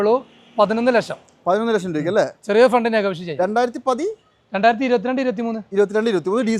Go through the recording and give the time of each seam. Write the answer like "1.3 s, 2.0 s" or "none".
none